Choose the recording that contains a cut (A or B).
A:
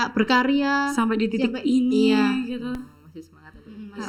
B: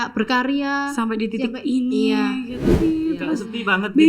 B